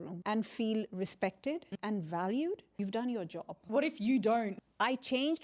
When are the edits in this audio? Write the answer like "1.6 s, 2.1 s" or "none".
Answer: 1.7 s, 2.8 s, 3.6 s, 4.6 s